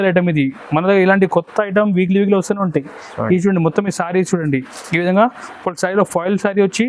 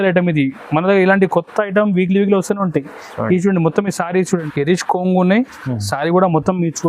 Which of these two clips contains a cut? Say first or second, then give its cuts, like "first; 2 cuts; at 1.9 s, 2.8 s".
second; 1 cut; at 4.4 s